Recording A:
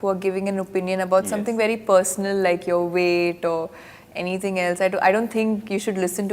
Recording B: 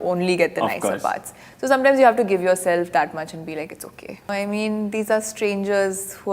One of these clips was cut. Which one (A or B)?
B